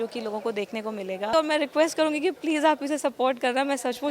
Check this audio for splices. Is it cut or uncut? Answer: cut